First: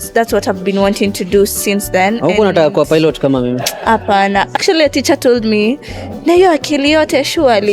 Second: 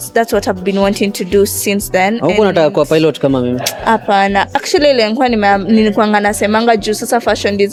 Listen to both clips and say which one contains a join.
first; 1 cut; at 4.5 s

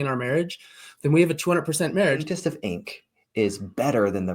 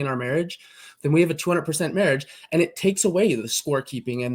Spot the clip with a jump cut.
first; 1 cut; at 2.3 s

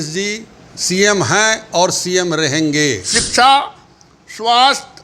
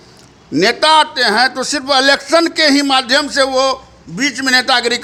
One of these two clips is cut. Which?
first; 1 cut; at 3.1 s

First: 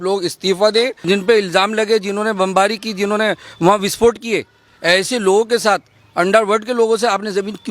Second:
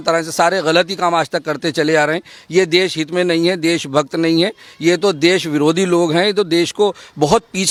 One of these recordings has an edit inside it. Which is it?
first; 1 cut; at 1.0 s

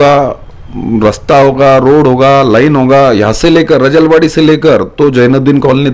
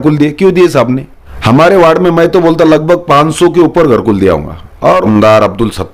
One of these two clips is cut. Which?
second; 2 cuts; at 1.1 s, 4.9 s

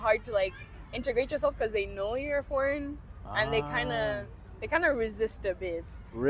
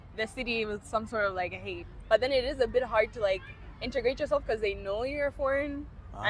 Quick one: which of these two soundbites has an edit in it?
second; 1 cut; at 1.9 s

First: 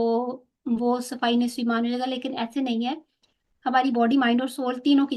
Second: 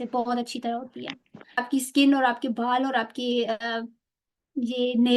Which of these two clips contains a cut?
second; 1 cut; at 1.6 s

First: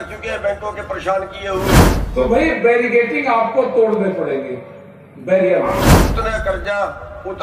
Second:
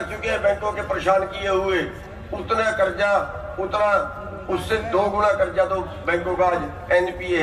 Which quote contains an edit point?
first; 2 cuts; at 2.0 s, 6.1 s

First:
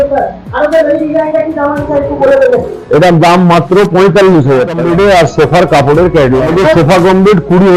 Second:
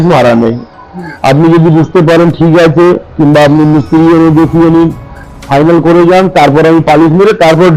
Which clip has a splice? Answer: first; 2 cuts; at 4.8 s, 6.5 s

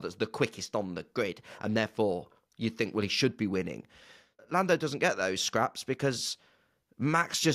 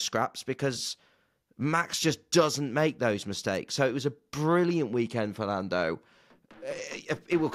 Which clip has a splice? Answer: first; 1 cut; at 4.5 s

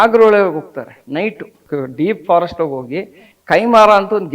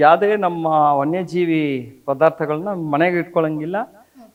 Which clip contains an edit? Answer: first; 1 cut; at 1.6 s

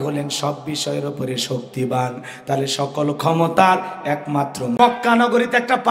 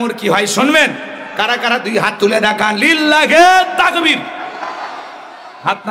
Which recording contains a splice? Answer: first; 1 cut; at 4.7 s

